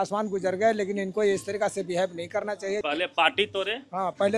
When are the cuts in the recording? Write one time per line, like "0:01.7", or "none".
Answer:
0:02.8